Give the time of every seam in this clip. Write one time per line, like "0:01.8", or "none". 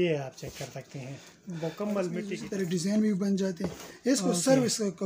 0:02.4